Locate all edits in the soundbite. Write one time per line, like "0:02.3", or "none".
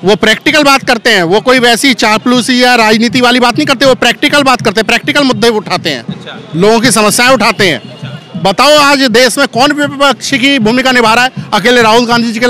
none